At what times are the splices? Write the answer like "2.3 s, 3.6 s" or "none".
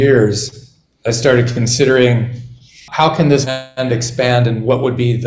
2.7 s